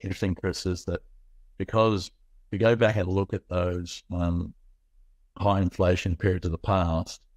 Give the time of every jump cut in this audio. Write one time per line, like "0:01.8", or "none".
none